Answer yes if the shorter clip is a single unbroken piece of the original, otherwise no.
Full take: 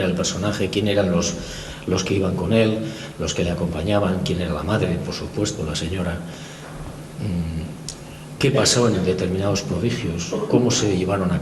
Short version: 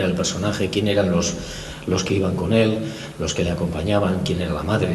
yes